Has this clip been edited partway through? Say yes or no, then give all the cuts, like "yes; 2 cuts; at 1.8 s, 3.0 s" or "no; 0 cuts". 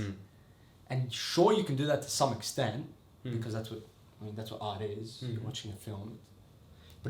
no; 0 cuts